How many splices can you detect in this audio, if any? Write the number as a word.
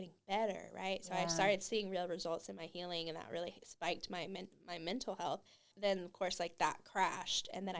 one